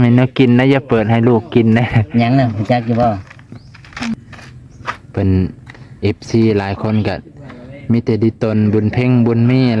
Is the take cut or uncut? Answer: cut